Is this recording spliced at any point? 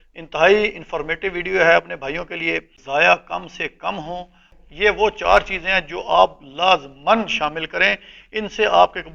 yes; 2 cuts; at 2.7 s, 4.6 s

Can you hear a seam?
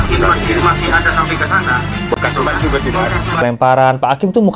yes; 1 cut; at 3.4 s

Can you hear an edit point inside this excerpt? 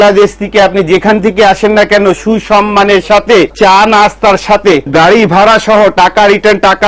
yes; 2 cuts; at 3.5 s, 4.9 s

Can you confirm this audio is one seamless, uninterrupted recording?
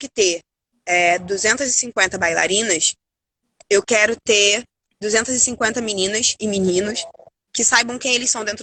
yes; 0 cuts

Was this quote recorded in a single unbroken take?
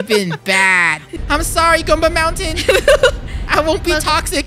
no; 1 cut; at 1.1 s

